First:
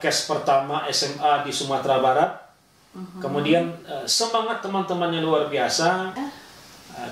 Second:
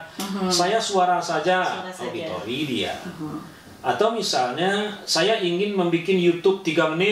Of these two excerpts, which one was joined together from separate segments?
first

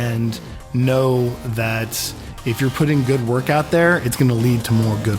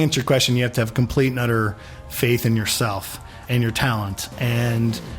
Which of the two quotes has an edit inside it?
second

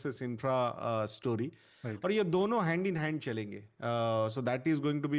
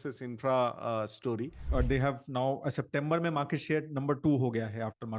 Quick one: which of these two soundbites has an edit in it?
second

